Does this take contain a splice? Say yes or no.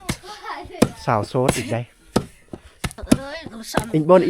yes